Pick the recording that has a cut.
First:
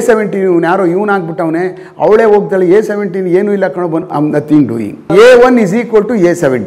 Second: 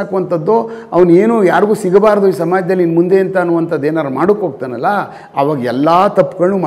first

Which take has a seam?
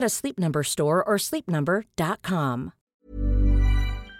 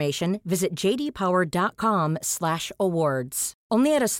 first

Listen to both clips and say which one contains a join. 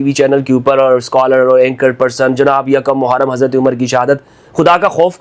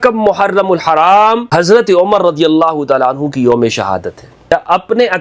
second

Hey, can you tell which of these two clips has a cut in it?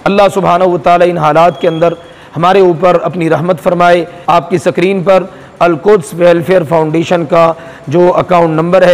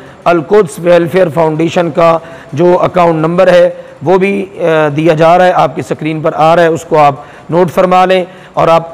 first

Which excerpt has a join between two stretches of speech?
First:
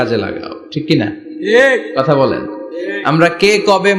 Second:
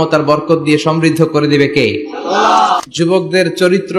second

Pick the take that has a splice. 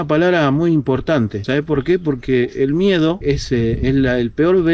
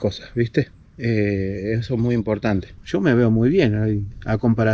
second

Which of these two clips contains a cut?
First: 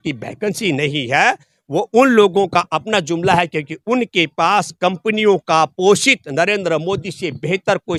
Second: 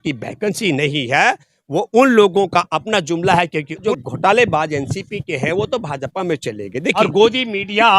second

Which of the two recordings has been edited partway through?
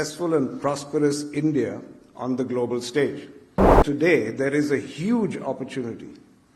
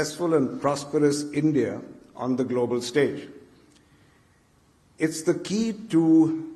first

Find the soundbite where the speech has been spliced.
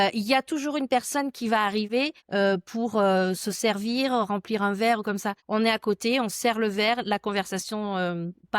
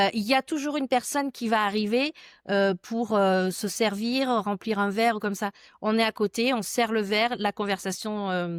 first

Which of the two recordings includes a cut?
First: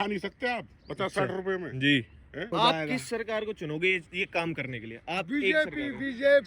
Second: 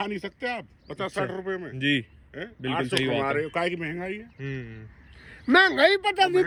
first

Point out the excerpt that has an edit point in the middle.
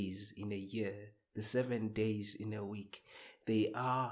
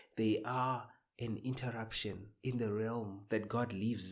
second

